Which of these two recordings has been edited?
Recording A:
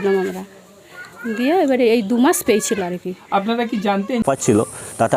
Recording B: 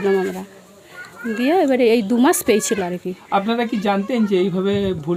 A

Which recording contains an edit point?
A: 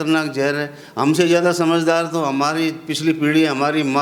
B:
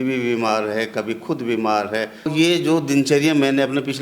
B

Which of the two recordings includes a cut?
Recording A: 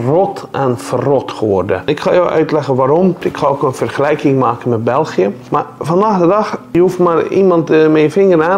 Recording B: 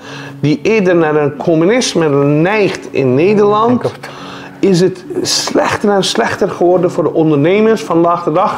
A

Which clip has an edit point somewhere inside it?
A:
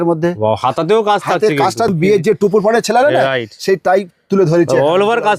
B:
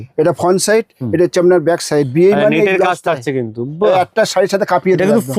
A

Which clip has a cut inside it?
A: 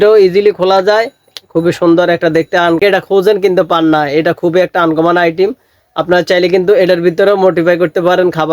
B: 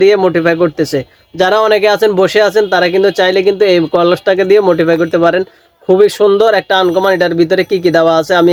A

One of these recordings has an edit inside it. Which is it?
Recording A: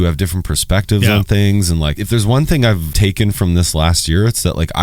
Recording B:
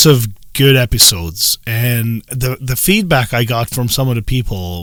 A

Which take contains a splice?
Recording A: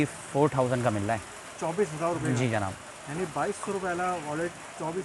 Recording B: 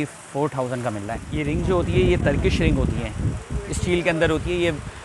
B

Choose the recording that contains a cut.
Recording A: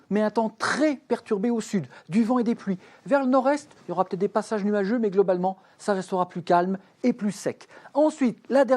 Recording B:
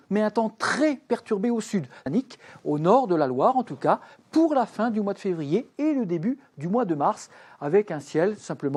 A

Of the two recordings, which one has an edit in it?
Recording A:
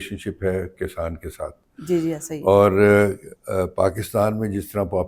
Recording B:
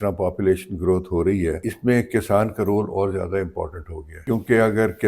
B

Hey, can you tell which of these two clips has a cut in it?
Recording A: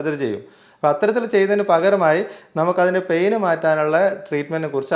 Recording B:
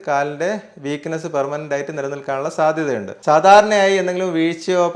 B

